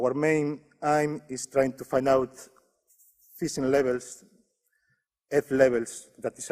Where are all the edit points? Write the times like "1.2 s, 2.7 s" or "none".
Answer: 1.3 s

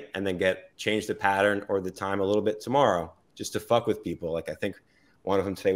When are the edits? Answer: none

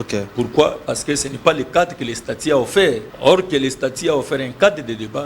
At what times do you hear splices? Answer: 3.1 s

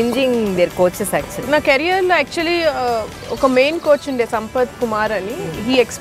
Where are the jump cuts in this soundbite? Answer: 1.4 s

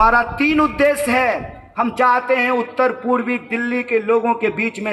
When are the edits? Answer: none

